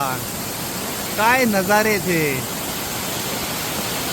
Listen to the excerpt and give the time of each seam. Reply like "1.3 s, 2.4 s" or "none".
none